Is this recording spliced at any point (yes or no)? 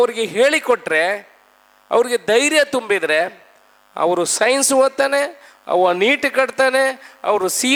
no